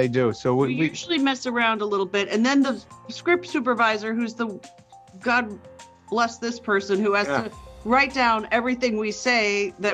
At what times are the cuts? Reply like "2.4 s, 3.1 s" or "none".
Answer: none